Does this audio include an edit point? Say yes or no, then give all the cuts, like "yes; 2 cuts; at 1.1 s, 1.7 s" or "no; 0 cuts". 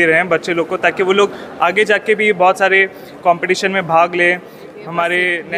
no; 0 cuts